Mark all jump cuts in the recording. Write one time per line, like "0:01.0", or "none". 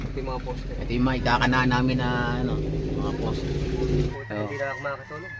0:04.1